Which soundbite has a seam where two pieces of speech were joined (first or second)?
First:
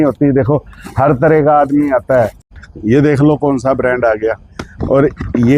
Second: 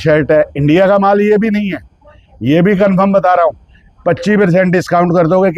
first